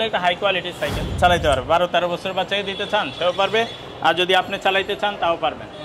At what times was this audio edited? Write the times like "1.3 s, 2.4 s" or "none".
1.1 s